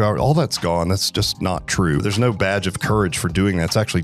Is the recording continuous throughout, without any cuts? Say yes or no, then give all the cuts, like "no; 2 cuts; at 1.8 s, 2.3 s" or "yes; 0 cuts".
no; 1 cut; at 2.0 s